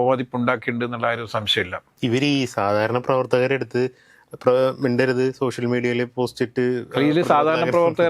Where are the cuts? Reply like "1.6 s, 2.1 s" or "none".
none